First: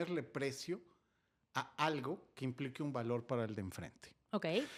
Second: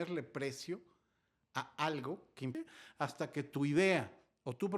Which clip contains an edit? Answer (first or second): second